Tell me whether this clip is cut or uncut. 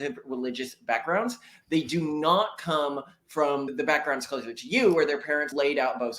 cut